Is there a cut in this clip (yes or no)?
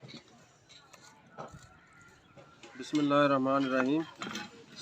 yes